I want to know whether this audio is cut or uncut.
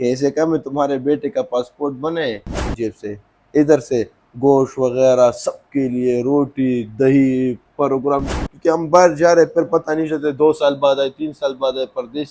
cut